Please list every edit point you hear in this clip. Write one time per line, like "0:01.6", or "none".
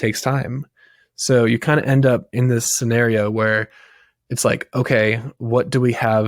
0:02.7